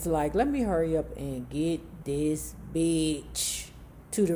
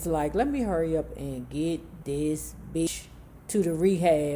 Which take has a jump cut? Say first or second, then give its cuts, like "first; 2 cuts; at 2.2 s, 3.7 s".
second; 1 cut; at 2.9 s